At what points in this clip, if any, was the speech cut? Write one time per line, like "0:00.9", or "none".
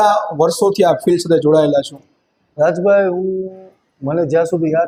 none